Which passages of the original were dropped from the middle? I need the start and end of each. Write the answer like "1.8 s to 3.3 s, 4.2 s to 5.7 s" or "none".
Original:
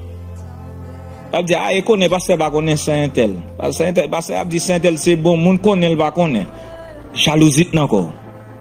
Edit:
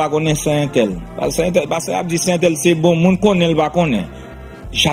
none